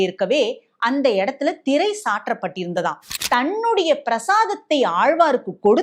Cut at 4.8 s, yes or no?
no